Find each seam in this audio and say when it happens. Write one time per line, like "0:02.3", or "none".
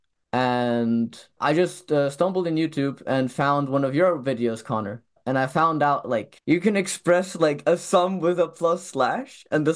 0:01.3